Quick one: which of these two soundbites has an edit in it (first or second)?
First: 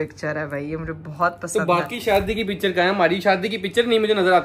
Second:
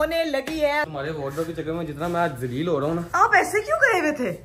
second